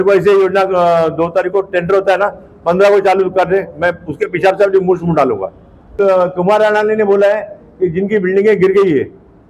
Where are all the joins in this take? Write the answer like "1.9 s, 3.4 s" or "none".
6.0 s